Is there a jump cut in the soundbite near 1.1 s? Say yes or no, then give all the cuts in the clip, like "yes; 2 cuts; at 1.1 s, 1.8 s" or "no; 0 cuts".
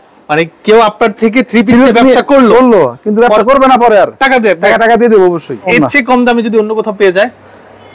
no; 1 cut; at 5.7 s